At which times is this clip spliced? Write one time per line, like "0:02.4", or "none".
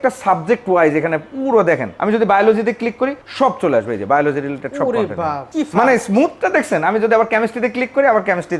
0:01.9
0:03.2
0:05.5